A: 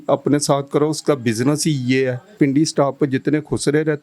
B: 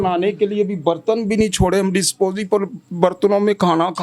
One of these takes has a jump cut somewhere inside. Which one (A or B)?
A